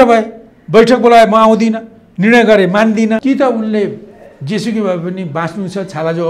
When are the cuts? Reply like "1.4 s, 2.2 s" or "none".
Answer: 3.2 s